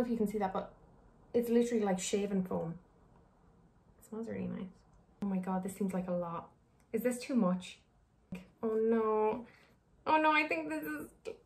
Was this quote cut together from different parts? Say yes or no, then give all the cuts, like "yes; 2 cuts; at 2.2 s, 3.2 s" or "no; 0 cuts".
yes; 1 cut; at 8.5 s